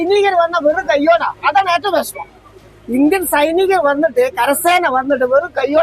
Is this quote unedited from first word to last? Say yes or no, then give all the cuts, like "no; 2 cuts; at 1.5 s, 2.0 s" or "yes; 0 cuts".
yes; 0 cuts